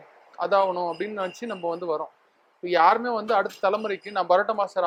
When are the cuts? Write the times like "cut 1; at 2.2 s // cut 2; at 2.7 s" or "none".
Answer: none